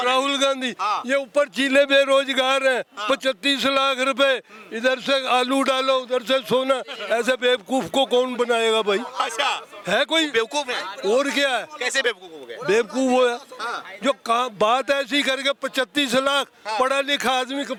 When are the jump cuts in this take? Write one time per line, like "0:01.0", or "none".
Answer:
none